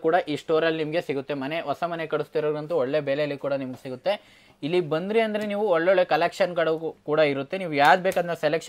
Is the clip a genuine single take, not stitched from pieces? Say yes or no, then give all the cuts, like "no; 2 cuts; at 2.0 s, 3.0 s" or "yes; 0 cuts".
yes; 0 cuts